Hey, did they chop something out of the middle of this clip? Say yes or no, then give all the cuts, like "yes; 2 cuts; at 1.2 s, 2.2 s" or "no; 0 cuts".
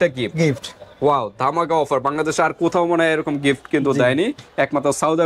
no; 0 cuts